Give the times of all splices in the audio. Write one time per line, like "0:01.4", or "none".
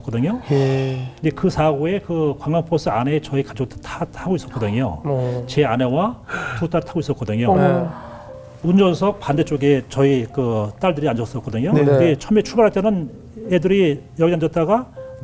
0:01.1
0:08.4

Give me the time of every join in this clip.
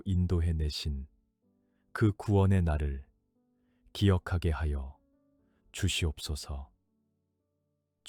none

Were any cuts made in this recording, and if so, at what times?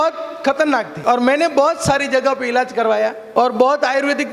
0:00.9
0:03.2

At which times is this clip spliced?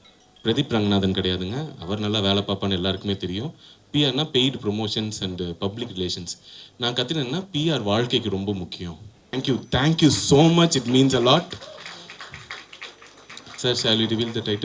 0:09.2

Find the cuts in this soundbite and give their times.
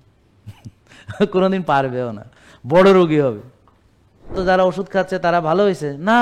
0:04.3

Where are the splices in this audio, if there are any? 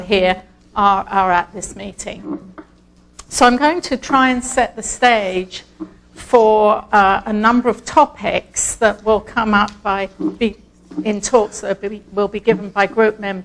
0:04.0

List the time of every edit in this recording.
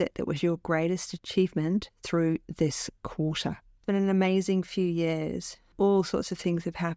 0:03.7

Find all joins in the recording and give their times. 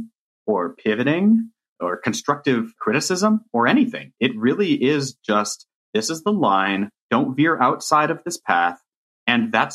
0:01.7
0:02.8
0:07.1

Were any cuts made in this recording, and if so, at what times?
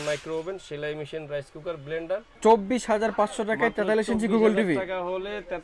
0:02.3

